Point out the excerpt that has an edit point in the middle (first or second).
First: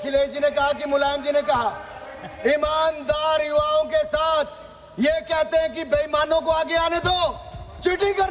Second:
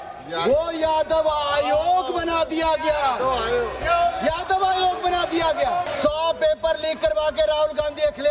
second